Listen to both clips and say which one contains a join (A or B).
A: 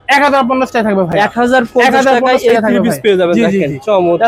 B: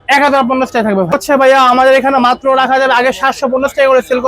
B